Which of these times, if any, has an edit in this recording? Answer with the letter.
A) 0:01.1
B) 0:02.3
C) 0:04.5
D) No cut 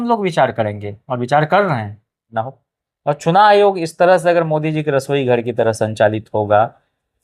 B